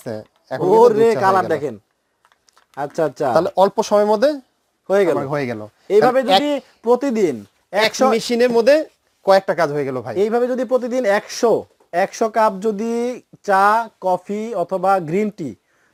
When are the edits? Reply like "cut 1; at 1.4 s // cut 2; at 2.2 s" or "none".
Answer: none